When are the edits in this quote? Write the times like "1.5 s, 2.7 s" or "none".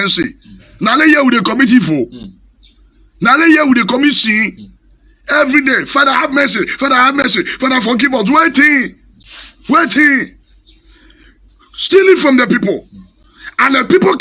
11.4 s